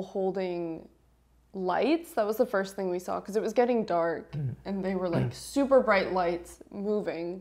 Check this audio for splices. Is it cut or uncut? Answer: uncut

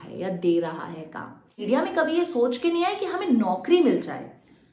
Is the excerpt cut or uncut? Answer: cut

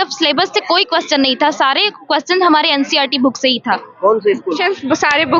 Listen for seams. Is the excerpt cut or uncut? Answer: uncut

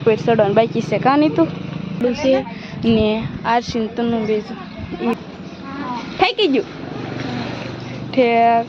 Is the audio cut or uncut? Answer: cut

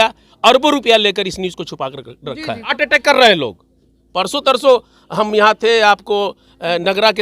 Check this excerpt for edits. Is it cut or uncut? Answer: cut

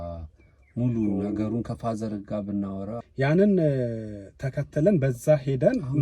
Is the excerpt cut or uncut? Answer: cut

